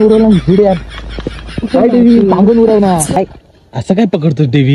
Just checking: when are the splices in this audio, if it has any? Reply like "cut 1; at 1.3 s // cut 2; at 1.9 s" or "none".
cut 1; at 3.2 s